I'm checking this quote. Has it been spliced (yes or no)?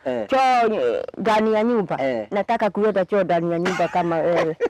no